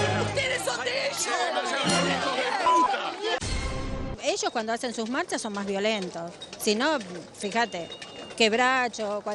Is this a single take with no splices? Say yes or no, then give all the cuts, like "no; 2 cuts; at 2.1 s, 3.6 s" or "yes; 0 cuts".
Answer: yes; 0 cuts